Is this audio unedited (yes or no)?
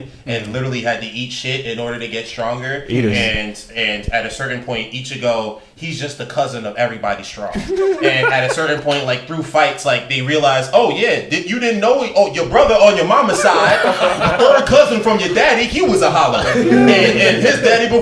yes